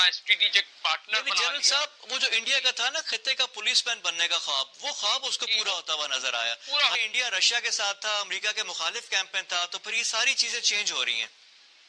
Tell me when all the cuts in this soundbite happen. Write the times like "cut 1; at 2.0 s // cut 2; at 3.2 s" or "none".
cut 1; at 7.0 s